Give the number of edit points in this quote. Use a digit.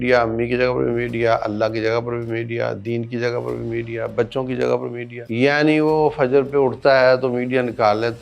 1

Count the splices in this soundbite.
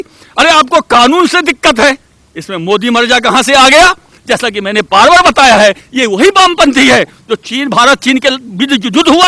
1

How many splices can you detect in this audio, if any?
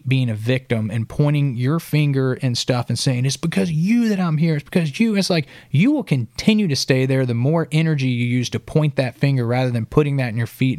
0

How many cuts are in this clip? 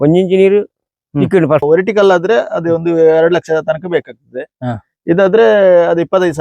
1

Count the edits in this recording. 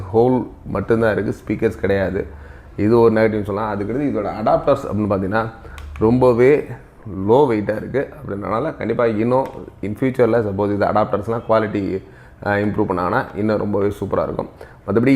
0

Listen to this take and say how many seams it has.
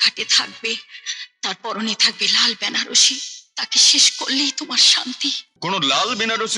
1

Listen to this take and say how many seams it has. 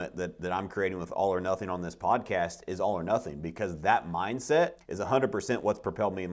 1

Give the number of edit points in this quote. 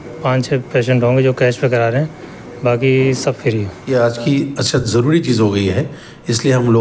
1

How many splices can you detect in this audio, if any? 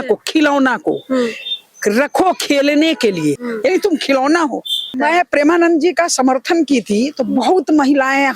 2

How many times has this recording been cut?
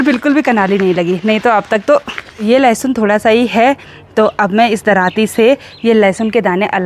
1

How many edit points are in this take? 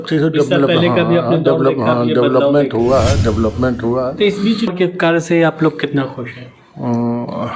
1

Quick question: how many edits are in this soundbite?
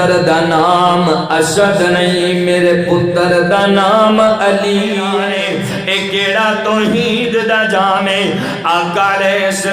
1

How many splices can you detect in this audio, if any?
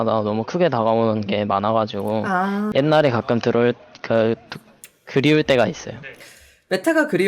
1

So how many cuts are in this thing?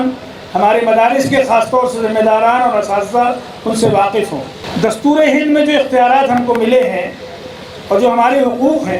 1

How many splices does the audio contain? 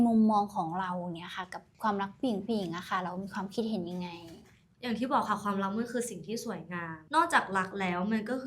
1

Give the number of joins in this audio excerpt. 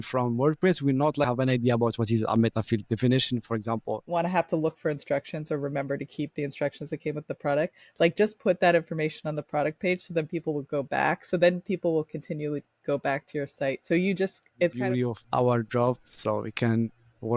3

